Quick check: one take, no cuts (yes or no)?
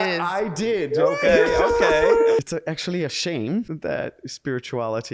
no